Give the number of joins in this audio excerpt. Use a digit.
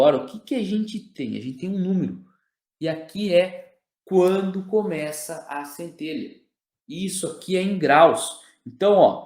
1